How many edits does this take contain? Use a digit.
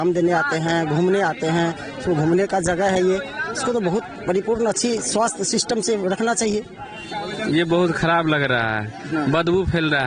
1